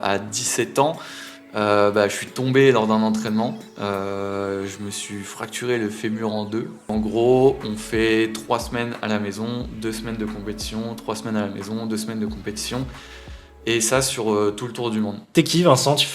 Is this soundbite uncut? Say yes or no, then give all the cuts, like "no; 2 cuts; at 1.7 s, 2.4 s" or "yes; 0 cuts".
no; 2 cuts; at 6.8 s, 15.2 s